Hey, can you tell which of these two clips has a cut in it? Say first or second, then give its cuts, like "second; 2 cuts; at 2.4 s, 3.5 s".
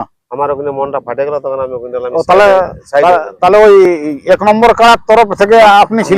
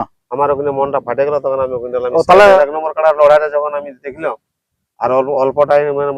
second; 1 cut; at 2.6 s